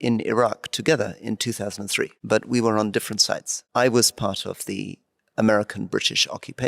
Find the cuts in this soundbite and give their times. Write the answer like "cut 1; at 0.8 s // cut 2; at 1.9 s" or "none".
cut 1; at 2.2 s // cut 2; at 3.6 s